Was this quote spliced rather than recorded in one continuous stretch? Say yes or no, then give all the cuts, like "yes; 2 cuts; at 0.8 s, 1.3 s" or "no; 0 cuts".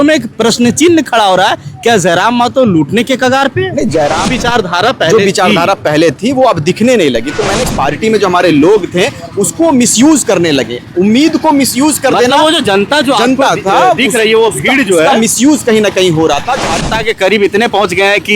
yes; 3 cuts; at 4.3 s, 7.6 s, 16.9 s